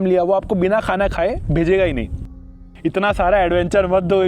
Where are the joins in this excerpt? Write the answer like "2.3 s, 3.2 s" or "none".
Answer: 2.5 s